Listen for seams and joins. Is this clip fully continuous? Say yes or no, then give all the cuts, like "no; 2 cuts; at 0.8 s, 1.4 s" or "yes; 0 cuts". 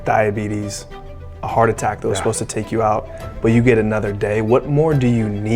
yes; 0 cuts